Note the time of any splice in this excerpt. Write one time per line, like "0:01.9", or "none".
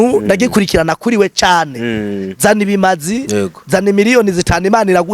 none

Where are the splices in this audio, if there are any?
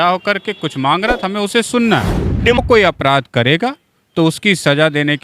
0:02.6

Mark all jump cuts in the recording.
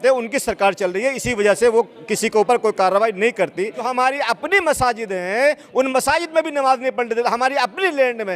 0:03.8

